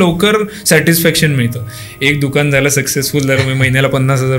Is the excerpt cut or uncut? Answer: uncut